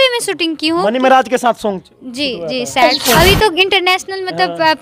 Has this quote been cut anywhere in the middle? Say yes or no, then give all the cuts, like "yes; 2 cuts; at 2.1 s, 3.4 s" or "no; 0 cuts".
yes; 1 cut; at 3.0 s